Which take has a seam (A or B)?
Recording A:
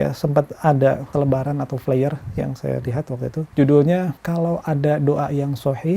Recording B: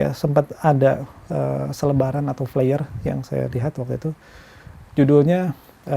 A